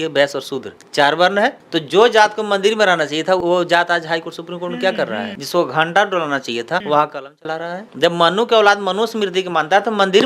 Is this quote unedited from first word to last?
no; 4 cuts; at 3.4 s, 5.4 s, 6.8 s, 7.8 s

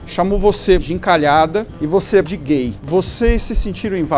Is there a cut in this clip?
yes; 2 cuts; at 0.8 s, 2.2 s

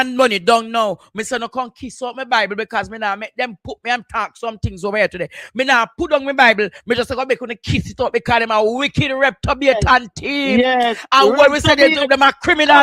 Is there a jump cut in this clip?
no; 0 cuts

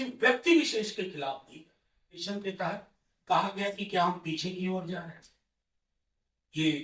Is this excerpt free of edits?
no; 1 cut; at 2.2 s

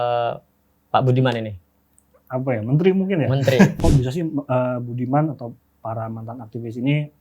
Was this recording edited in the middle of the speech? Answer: yes; 1 cut; at 3.8 s

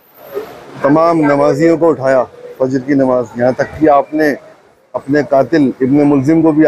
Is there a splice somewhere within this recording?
no; 0 cuts

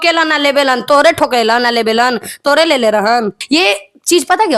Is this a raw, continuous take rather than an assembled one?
no; 1 cut; at 3.4 s

